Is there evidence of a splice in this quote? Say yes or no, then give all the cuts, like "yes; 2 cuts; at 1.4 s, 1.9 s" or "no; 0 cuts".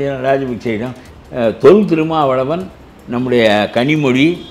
yes; 1 cut; at 1.0 s